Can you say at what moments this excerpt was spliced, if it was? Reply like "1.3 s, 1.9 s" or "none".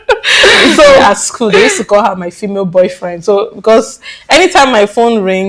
1.0 s